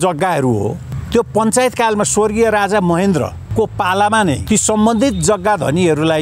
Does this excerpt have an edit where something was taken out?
yes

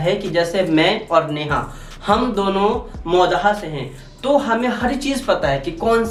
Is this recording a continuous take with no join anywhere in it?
yes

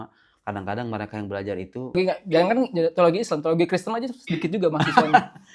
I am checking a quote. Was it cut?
yes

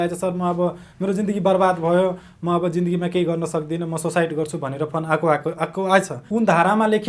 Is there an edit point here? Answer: yes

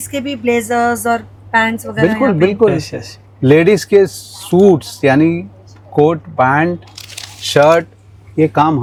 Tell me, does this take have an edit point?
no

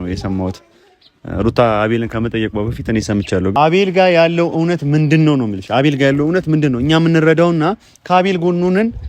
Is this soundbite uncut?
no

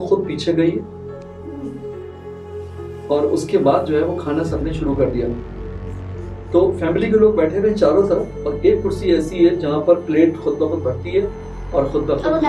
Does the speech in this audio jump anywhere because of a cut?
no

